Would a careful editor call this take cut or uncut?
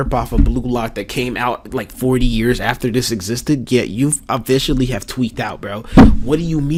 uncut